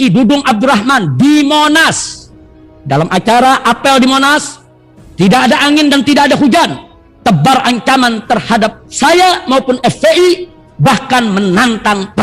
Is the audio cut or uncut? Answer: uncut